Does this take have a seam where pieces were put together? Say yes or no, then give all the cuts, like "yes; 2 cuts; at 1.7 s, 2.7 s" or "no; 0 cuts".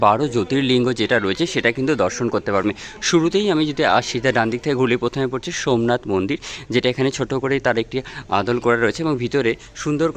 no; 0 cuts